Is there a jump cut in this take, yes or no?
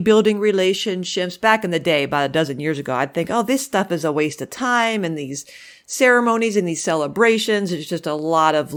no